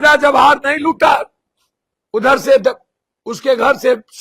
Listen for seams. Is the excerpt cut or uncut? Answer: uncut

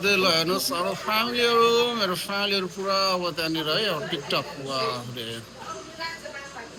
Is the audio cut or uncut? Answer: uncut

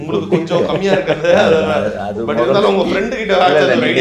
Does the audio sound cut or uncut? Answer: uncut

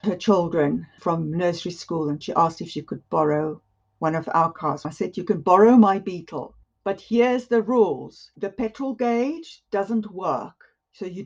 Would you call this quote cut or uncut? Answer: cut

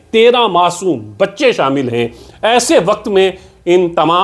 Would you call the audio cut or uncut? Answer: uncut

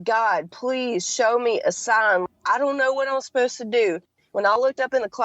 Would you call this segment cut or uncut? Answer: cut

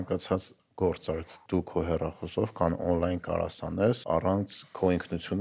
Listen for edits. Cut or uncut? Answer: cut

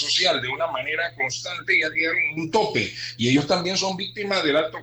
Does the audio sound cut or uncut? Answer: uncut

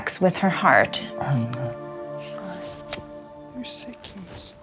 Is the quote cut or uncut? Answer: uncut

